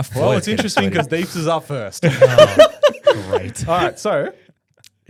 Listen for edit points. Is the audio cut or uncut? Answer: uncut